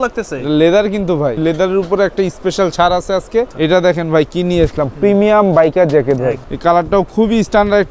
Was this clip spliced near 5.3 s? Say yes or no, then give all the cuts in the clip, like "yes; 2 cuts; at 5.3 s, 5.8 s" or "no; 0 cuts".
no; 3 cuts; at 1.4 s, 3.5 s, 6.5 s